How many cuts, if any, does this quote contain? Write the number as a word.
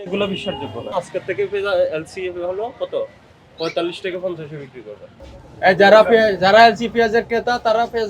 two